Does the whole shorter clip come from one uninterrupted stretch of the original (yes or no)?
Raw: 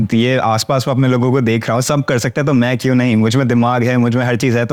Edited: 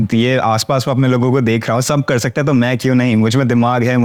yes